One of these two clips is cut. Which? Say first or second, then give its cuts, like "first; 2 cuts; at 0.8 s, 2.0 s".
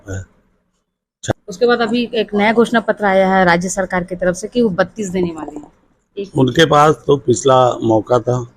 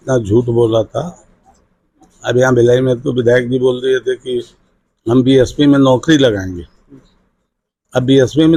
first; 1 cut; at 1.3 s